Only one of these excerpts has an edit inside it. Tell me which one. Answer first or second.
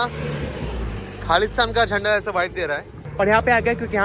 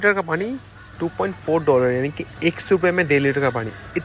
first